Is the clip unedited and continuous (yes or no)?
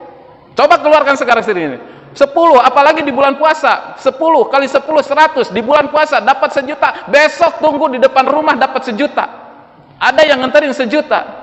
yes